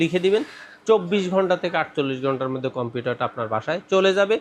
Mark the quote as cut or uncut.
uncut